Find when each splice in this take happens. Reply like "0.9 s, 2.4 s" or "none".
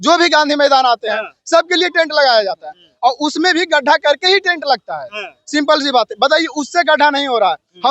none